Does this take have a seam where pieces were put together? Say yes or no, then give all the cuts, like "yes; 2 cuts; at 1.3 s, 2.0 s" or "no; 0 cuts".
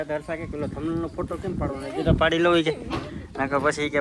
no; 0 cuts